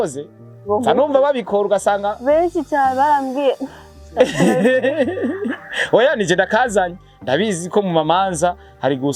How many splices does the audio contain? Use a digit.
0